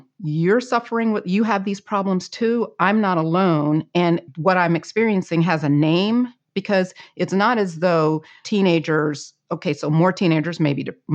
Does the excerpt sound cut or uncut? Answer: cut